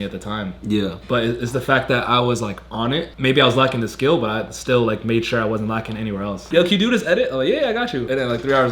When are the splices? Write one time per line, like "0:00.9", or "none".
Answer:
0:03.1
0:06.4